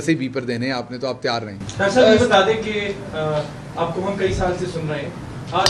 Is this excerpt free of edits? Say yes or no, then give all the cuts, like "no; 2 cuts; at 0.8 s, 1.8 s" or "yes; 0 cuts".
yes; 0 cuts